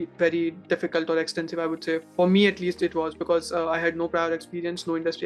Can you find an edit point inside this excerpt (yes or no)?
no